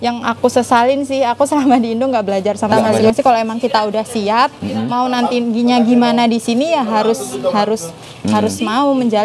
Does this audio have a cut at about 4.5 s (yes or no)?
no